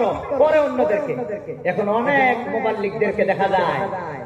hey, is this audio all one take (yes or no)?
yes